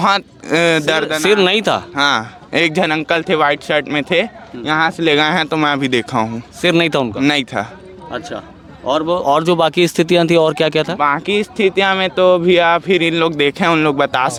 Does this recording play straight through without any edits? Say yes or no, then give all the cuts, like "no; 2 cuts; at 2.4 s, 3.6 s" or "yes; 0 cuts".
yes; 0 cuts